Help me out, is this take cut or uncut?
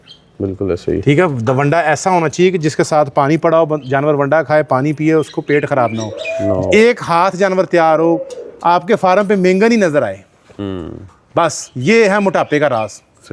uncut